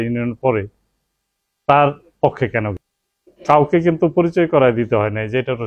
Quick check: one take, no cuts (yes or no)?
no